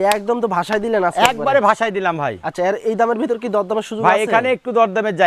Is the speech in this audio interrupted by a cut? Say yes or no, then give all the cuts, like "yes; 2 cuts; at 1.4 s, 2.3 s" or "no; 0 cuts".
no; 0 cuts